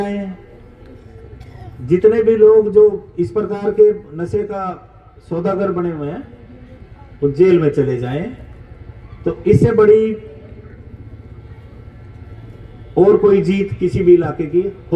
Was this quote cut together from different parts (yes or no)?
no